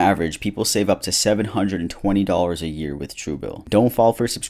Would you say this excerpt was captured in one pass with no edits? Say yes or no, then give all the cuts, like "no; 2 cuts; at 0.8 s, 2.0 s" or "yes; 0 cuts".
no; 1 cut; at 3.6 s